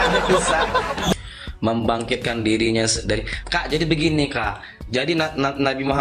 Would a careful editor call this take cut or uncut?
cut